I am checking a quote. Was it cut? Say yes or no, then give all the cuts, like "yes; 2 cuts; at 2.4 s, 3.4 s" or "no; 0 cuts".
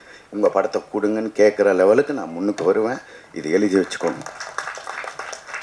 no; 0 cuts